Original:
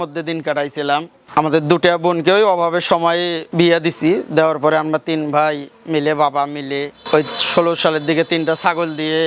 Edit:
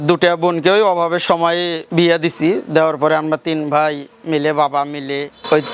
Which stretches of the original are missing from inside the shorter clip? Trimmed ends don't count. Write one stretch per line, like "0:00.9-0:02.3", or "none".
none